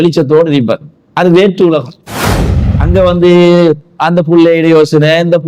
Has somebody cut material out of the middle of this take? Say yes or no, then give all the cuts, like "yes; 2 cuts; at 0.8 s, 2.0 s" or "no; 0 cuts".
no; 0 cuts